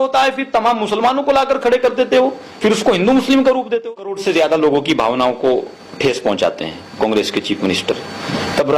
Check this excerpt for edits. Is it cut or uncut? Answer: cut